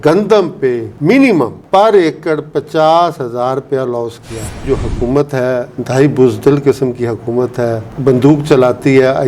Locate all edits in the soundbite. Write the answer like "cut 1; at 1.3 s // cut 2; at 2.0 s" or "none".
cut 1; at 1.6 s // cut 2; at 4.6 s